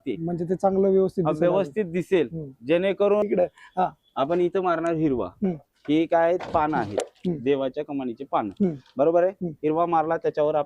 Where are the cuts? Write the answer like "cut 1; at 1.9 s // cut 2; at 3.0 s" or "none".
cut 1; at 3.2 s